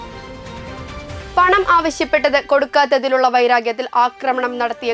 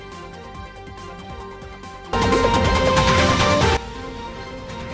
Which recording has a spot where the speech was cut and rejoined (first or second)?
second